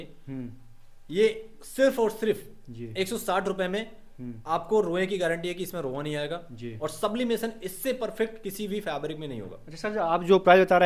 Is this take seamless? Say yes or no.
yes